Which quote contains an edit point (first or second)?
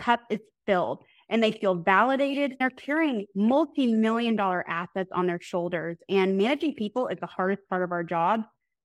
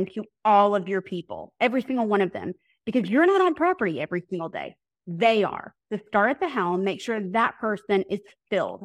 first